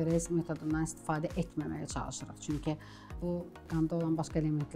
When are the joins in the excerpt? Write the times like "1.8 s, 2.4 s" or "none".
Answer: 3.2 s